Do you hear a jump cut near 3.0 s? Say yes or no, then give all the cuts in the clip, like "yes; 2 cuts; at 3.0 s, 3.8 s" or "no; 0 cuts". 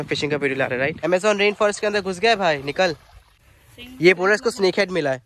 no; 1 cut; at 1.0 s